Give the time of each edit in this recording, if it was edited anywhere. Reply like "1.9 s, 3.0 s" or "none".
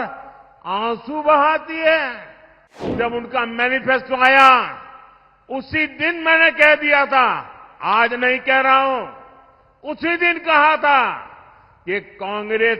2.9 s